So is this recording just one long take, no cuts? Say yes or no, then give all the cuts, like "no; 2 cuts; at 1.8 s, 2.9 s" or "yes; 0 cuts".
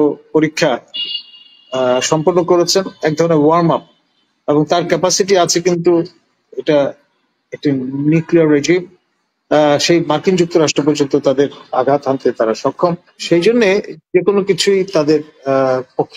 no; 1 cut; at 13.2 s